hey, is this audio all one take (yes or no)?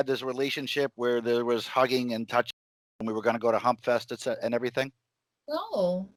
yes